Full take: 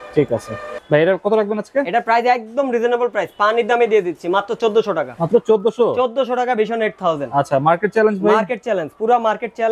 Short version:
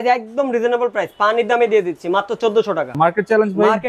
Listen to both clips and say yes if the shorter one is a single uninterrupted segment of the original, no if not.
no